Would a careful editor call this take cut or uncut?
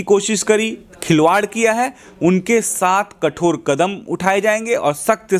uncut